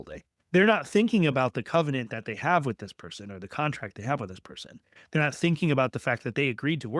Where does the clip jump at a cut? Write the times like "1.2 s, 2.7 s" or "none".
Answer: none

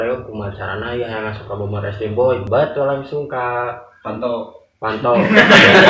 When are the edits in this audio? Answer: 2.4 s

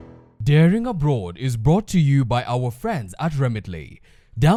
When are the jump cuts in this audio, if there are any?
none

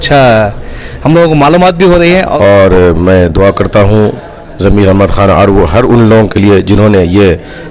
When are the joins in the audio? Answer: 2.3 s

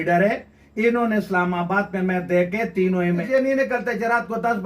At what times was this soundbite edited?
3.2 s

